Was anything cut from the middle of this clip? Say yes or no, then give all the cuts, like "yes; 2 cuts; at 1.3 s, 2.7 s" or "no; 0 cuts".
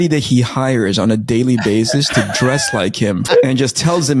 yes; 1 cut; at 3.2 s